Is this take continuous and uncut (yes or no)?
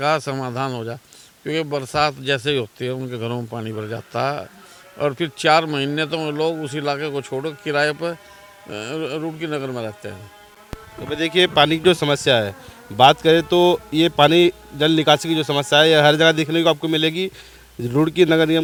yes